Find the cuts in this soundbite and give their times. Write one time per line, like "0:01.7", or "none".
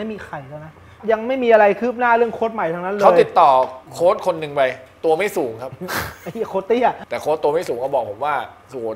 0:00.9
0:03.8
0:07.0